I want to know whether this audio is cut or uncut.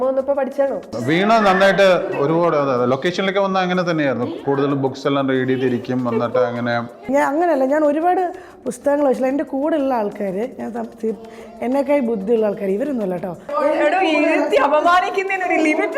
cut